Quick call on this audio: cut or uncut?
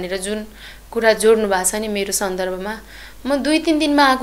uncut